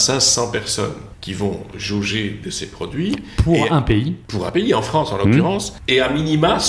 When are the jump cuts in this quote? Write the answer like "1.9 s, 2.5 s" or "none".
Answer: 1.1 s, 1.7 s, 4.4 s, 5.7 s